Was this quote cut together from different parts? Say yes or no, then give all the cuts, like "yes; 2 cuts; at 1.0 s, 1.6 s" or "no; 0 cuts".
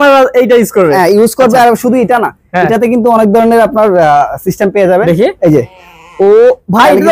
no; 0 cuts